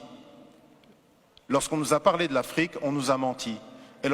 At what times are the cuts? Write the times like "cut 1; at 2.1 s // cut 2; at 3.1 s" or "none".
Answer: cut 1; at 1.0 s